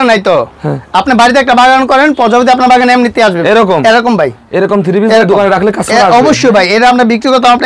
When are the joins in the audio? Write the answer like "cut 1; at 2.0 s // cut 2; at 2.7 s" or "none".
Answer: none